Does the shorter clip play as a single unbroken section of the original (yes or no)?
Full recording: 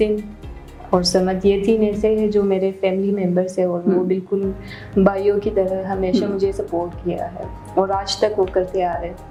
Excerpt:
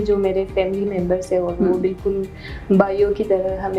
yes